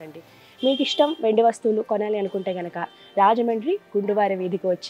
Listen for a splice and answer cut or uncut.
uncut